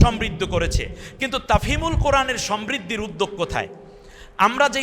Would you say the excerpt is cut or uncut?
uncut